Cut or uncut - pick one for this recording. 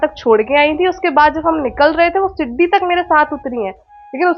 uncut